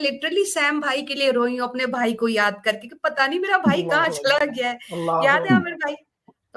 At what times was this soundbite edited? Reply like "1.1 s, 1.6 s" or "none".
none